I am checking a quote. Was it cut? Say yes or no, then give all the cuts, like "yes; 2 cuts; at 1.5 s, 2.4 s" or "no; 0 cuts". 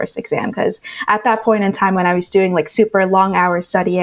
no; 0 cuts